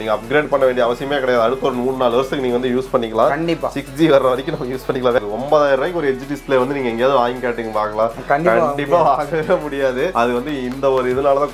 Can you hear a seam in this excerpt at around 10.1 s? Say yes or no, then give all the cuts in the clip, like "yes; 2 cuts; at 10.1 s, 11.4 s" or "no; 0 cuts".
yes; 2 cuts; at 5.2 s, 10.1 s